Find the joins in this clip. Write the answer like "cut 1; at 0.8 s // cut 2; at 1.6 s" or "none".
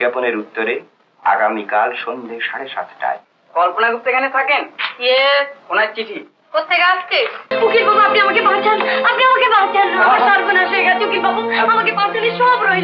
cut 1; at 7.5 s